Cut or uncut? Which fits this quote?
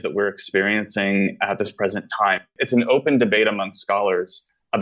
uncut